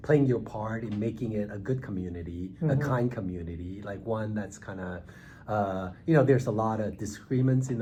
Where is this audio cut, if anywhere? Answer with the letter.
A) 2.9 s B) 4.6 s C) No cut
C